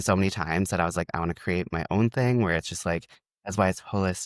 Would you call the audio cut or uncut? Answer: uncut